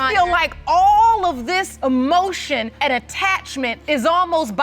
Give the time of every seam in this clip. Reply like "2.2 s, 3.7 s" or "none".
1.7 s, 2.7 s, 3.8 s